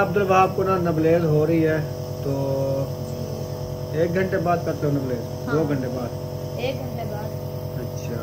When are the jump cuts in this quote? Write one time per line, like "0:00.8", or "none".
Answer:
none